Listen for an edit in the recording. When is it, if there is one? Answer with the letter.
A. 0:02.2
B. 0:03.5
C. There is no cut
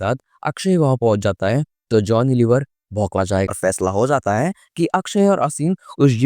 B